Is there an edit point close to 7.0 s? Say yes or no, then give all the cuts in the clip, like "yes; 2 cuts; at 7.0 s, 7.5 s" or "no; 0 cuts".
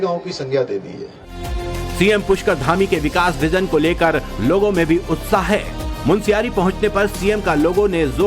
no; 1 cut; at 4.3 s